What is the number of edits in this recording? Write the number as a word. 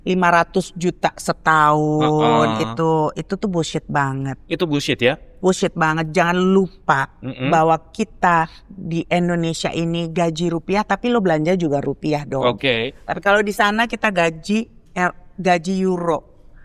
zero